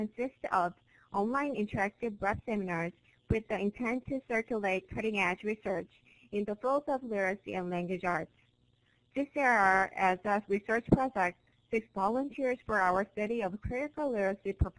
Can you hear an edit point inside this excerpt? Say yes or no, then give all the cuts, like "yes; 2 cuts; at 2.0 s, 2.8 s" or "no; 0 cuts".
yes; 1 cut; at 10.7 s